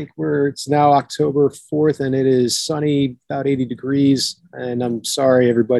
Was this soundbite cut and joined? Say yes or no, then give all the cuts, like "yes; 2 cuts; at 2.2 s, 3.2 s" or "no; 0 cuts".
no; 0 cuts